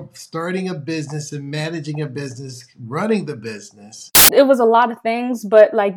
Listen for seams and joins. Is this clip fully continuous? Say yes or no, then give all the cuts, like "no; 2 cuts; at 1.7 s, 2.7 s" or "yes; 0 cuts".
no; 1 cut; at 4.0 s